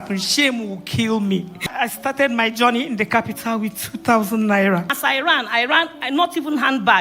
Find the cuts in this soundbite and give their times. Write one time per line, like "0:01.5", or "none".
0:01.7
0:04.9